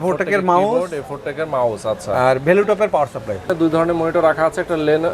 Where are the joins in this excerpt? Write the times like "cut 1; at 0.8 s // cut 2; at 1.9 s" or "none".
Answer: cut 1; at 3.5 s